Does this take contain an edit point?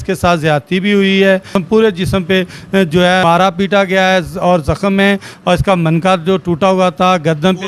yes; 2 cuts; at 1.5 s, 3.2 s

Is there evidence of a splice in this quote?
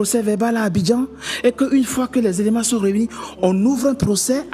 no; 0 cuts

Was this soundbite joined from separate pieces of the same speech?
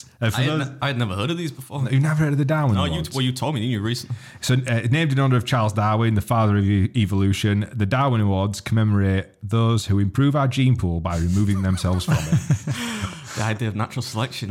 no; 0 cuts

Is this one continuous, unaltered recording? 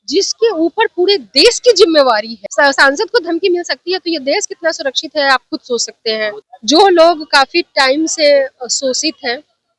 no; 2 cuts; at 2.3 s, 6.5 s

